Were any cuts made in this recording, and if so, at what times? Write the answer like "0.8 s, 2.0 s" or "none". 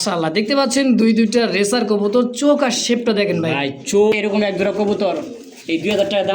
4.1 s

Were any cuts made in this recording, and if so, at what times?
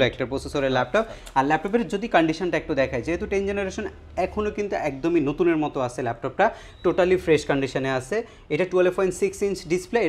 none

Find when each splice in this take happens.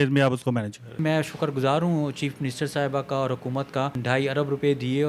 1.0 s, 4.0 s

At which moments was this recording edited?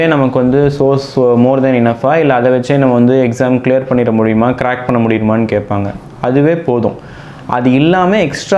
none

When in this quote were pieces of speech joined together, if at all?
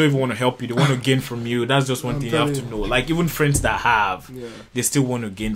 none

